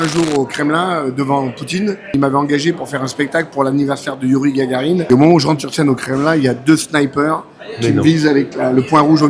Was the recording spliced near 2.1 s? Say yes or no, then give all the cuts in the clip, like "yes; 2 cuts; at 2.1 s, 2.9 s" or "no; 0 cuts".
yes; 2 cuts; at 2.1 s, 5.0 s